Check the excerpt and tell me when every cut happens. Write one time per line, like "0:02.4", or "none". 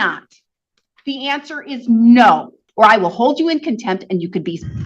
0:02.6